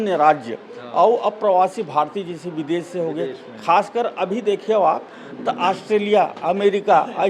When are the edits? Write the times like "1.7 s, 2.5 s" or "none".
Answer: none